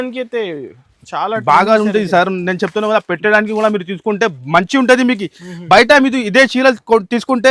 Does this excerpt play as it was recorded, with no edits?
yes; 0 cuts

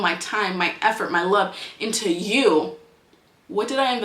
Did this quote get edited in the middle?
no; 0 cuts

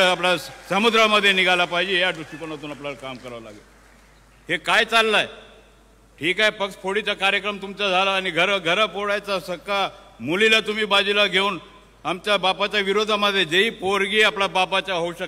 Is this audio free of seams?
yes; 0 cuts

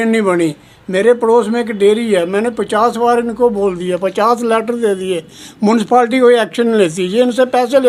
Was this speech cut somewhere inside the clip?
no; 0 cuts

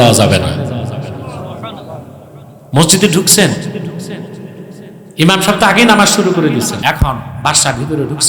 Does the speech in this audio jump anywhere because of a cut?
yes; 1 cut; at 6.8 s

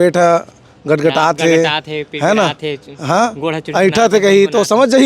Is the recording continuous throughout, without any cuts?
yes; 0 cuts

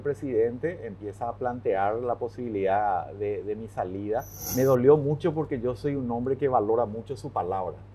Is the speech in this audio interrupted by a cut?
yes; 1 cut; at 4.4 s

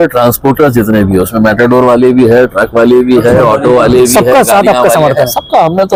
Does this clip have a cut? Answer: no; 0 cuts

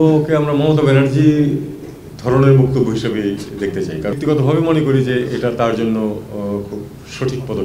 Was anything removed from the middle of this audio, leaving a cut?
yes; 1 cut; at 4.1 s

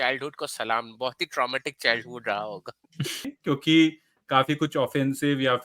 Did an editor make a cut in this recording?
yes; 1 cut; at 3.2 s

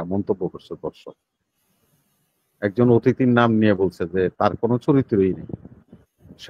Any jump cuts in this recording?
no; 0 cuts

